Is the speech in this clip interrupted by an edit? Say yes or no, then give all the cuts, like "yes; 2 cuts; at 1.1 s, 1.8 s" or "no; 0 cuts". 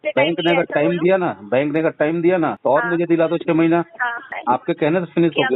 yes; 2 cuts; at 2.6 s, 4.3 s